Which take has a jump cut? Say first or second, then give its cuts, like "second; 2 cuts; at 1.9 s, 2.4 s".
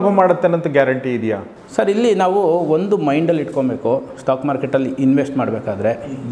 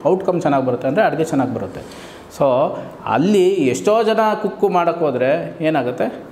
first; 1 cut; at 1.5 s